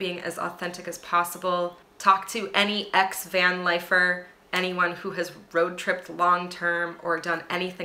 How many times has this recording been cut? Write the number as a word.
one